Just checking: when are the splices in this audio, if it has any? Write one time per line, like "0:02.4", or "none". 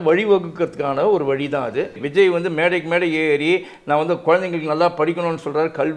0:02.0